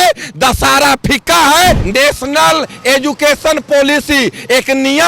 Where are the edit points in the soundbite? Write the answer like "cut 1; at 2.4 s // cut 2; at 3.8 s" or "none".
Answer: cut 1; at 1.8 s